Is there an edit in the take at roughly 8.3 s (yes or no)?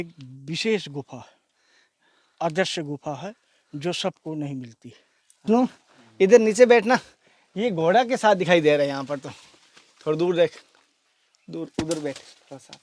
no